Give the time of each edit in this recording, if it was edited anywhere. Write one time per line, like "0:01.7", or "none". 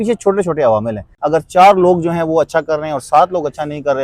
0:01.1

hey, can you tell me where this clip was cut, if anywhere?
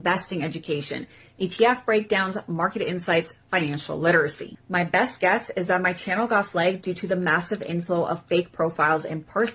none

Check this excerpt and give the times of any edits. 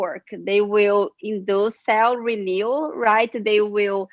0:01.8

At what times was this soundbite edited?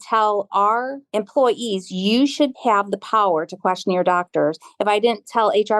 0:01.0
0:02.6

